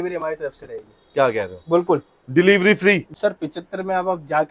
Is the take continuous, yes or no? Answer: no